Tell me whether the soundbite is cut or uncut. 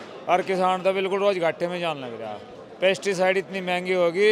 uncut